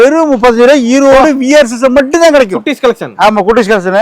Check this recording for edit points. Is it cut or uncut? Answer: uncut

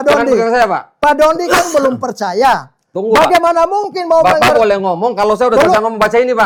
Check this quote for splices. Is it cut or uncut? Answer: uncut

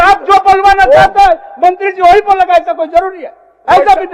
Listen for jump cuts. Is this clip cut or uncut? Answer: uncut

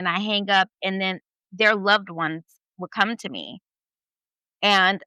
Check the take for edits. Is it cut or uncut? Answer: uncut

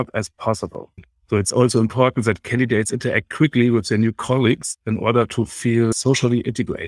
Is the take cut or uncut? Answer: cut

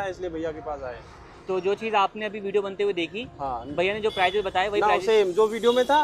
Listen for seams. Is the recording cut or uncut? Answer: uncut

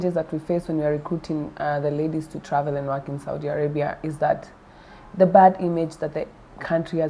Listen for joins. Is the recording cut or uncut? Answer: uncut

